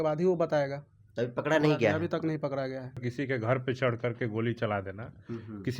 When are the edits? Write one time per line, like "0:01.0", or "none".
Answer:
0:03.0

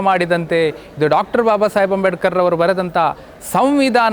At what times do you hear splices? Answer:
none

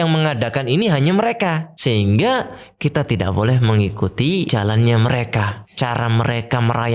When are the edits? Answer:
0:01.7
0:04.5
0:05.6

